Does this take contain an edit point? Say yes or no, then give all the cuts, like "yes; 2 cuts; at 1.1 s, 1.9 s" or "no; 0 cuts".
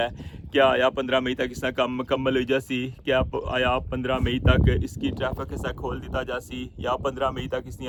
no; 0 cuts